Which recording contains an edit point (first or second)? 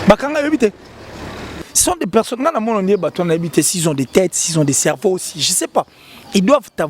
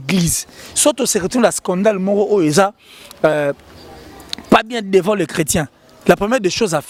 first